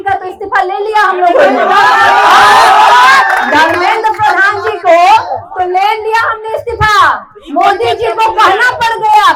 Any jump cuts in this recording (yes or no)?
no